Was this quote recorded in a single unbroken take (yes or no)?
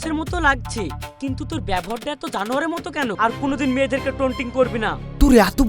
no